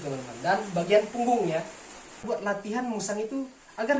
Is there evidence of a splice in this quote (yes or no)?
yes